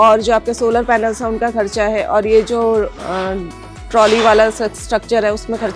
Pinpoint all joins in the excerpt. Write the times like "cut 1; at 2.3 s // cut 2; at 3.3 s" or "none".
none

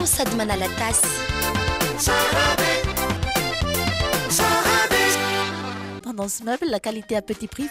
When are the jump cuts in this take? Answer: cut 1; at 5.9 s

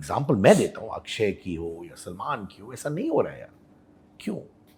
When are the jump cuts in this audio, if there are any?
none

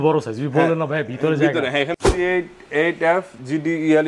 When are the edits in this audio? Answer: cut 1; at 1.9 s

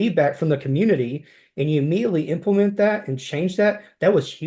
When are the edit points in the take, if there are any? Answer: none

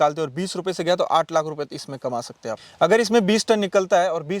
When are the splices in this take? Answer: cut 1; at 2.6 s

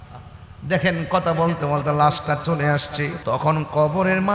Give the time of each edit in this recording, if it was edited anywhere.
cut 1; at 3.2 s

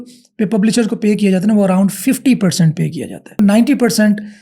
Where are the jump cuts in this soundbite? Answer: cut 1; at 3.4 s

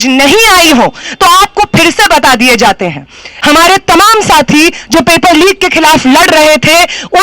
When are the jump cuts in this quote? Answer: cut 1; at 3.3 s

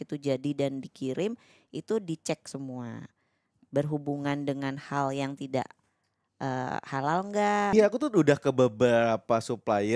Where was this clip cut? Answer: cut 1; at 7.7 s

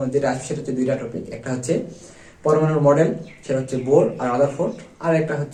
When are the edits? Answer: none

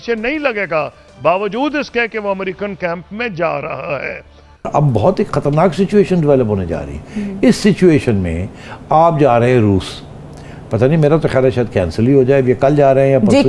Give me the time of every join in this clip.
cut 1; at 4.7 s

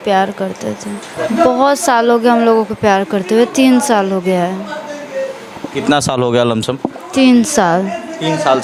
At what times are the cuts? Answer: none

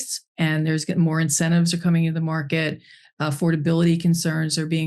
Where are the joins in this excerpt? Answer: none

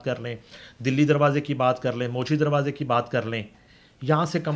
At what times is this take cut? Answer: none

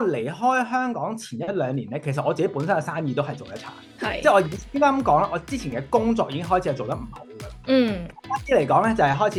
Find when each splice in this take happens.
none

